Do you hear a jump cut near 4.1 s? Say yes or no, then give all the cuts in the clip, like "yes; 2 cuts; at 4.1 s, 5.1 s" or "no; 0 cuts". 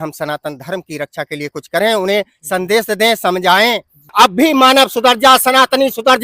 yes; 1 cut; at 4.1 s